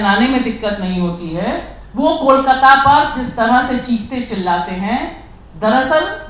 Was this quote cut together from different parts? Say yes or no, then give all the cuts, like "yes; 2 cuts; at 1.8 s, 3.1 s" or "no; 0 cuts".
yes; 1 cut; at 1.8 s